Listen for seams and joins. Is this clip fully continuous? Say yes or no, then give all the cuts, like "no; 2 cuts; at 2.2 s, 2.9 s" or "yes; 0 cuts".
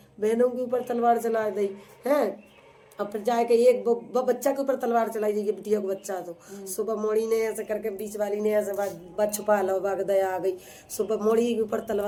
yes; 0 cuts